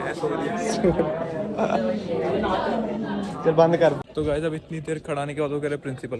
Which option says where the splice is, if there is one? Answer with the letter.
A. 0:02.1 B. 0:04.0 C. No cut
B